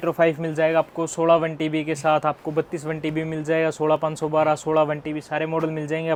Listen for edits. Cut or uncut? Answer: uncut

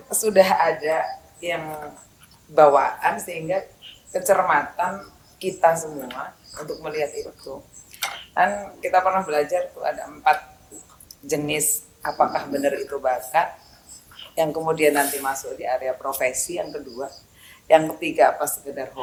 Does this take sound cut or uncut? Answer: uncut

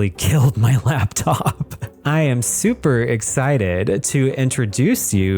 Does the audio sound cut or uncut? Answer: cut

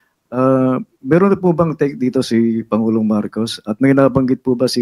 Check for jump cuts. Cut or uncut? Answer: uncut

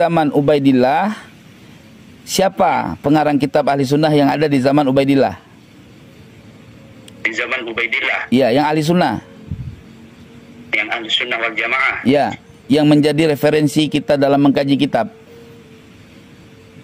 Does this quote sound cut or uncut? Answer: uncut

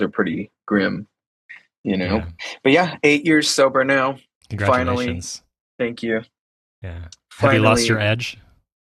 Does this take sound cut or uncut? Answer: uncut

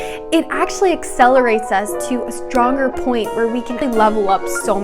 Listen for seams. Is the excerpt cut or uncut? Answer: cut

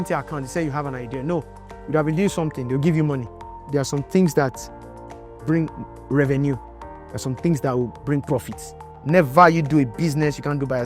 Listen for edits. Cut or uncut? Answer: cut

